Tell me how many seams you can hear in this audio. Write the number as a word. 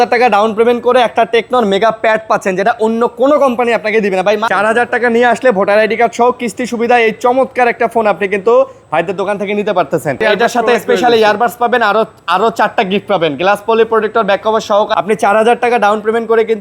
three